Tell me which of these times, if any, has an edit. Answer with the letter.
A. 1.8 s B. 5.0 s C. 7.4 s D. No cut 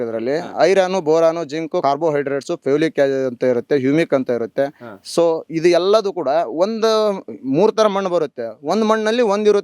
A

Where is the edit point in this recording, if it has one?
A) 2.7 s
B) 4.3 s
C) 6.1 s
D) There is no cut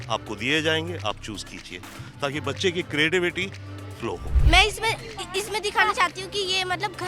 B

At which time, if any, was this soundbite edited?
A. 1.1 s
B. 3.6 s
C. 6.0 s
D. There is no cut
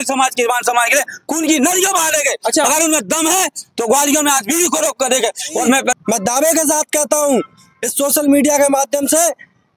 C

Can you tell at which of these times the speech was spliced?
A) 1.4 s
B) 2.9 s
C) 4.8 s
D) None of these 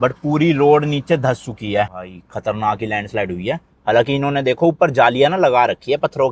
D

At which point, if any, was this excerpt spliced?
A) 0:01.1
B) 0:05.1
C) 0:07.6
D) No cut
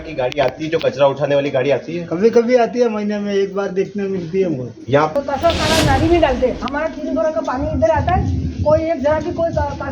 B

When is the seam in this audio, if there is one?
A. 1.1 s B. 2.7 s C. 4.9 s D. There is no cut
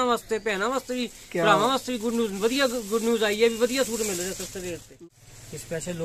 C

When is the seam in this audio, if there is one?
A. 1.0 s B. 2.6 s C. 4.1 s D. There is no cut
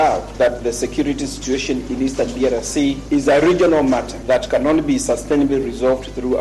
C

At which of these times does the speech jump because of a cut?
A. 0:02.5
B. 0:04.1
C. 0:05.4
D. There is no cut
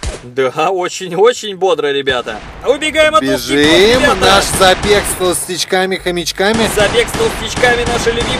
A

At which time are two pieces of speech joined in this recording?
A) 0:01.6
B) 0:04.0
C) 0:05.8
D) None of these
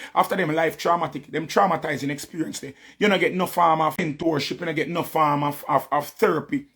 B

